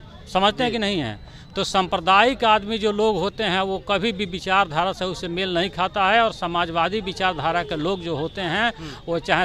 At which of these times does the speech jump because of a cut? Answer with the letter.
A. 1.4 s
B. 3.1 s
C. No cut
C